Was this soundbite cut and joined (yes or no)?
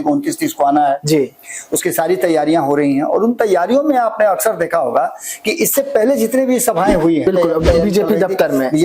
yes